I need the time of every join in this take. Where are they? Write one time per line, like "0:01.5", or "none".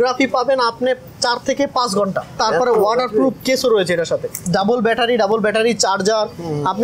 0:02.4
0:04.4